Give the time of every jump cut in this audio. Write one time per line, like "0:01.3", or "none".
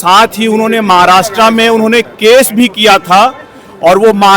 none

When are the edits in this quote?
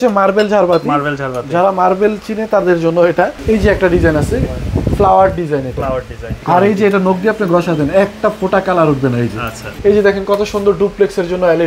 0:03.4
0:06.3
0:09.7

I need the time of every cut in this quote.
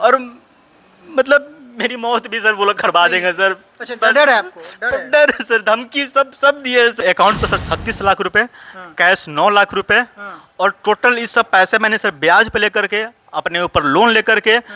0:07.0

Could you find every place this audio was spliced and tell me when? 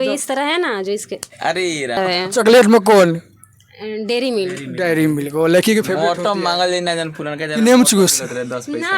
0:02.0

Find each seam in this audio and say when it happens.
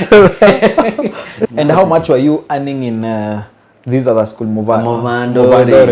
0:01.3

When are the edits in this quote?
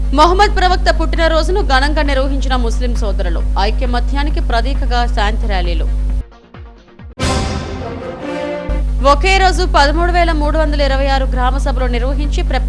none

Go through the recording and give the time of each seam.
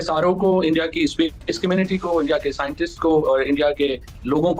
none

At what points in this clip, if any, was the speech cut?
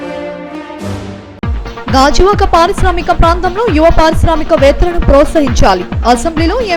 0:01.2

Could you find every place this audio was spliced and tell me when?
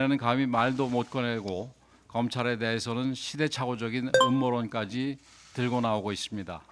none

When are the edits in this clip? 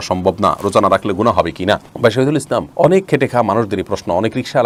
none

